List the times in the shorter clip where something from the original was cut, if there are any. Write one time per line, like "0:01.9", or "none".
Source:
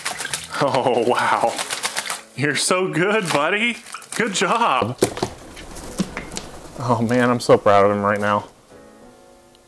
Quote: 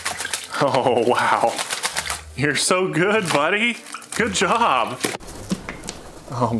0:04.8